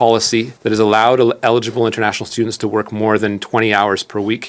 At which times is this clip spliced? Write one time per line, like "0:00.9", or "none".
none